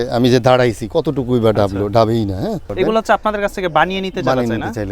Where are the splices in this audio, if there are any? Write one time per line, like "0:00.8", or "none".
0:02.7